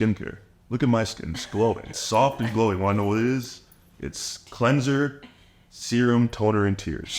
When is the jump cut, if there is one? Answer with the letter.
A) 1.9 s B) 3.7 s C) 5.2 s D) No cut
A